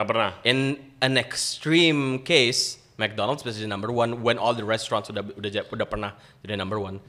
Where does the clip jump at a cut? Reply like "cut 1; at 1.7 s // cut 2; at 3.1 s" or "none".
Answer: none